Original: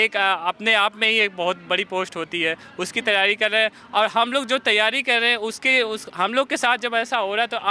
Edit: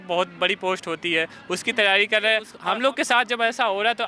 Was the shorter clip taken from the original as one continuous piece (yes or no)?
no